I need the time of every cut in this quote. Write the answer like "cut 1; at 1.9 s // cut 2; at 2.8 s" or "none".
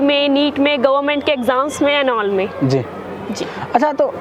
none